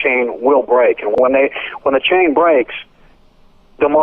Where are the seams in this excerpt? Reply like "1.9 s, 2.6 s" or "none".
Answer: 1.1 s